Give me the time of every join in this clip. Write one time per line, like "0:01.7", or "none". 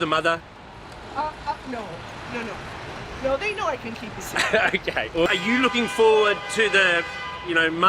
0:05.4